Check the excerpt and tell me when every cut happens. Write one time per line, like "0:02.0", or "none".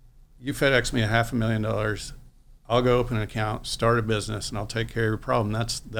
none

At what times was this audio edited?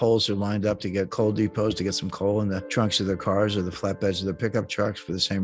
0:01.1

